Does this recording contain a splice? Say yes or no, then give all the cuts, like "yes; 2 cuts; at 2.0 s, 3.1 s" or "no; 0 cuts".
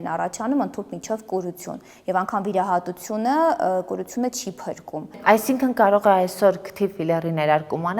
yes; 1 cut; at 5.1 s